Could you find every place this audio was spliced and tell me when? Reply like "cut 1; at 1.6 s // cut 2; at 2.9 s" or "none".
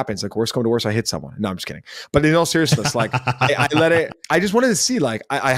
cut 1; at 4.2 s